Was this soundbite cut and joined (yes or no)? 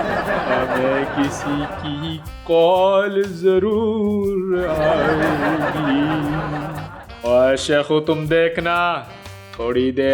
no